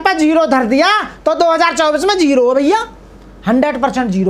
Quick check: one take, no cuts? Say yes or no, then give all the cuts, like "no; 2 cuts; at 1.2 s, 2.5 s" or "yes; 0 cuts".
yes; 0 cuts